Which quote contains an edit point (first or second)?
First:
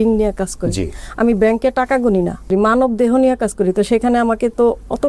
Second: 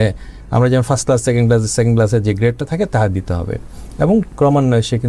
first